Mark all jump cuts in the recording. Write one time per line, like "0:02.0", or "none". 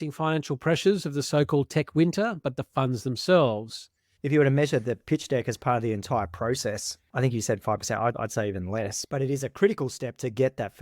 0:04.1